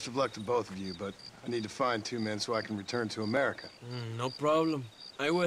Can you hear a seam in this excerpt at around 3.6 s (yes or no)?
no